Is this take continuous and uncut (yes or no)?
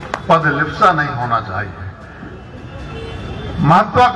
yes